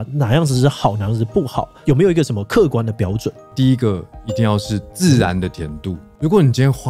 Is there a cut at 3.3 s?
yes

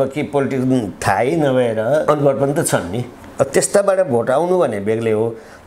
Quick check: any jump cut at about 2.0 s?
yes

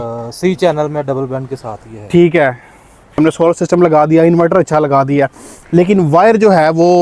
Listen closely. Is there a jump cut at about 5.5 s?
no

